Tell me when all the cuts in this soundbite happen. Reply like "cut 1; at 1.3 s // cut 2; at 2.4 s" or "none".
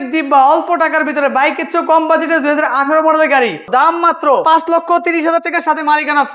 cut 1; at 3.7 s